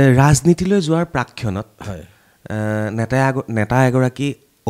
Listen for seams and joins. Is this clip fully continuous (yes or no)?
yes